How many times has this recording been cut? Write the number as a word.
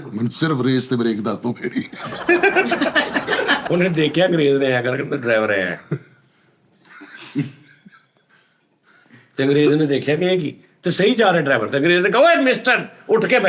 one